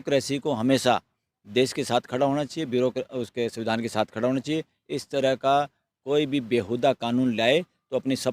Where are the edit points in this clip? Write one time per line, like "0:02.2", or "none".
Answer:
none